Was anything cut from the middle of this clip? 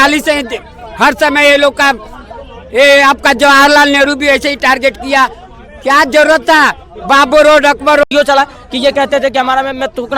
yes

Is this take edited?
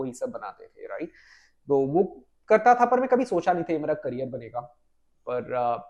no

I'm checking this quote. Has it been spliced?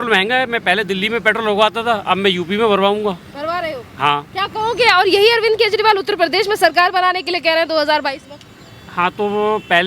no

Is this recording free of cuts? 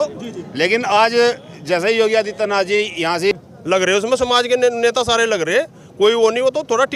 no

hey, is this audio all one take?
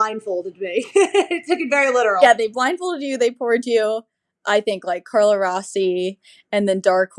no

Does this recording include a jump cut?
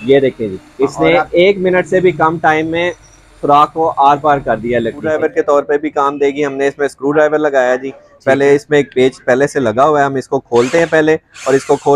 yes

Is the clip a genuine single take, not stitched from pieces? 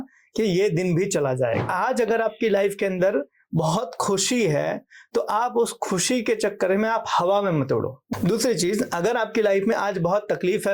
no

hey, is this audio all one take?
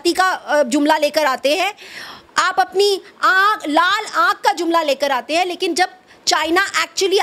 yes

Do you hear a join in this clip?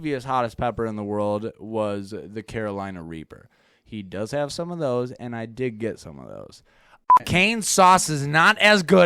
yes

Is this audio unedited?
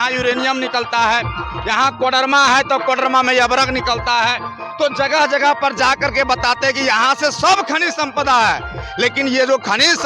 yes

